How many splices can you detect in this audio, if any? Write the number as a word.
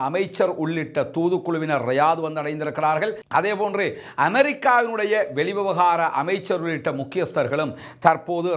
zero